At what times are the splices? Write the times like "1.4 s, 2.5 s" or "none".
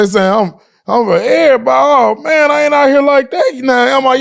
none